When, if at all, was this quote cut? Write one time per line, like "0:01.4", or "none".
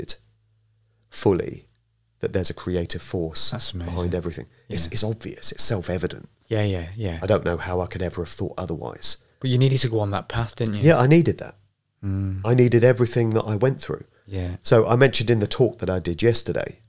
none